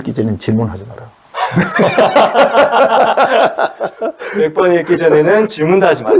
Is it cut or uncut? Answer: uncut